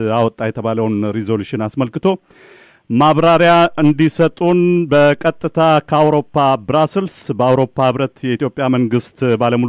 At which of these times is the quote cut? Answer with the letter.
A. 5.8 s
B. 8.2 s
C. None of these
C